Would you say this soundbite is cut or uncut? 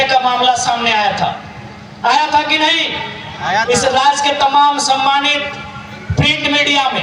uncut